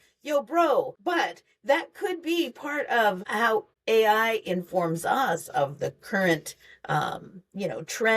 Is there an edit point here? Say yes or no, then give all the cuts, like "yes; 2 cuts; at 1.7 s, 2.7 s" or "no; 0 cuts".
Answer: yes; 2 cuts; at 1.0 s, 3.5 s